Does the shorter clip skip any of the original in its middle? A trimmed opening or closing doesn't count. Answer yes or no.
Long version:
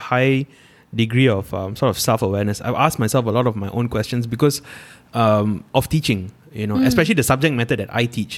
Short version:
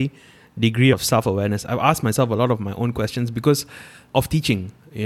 yes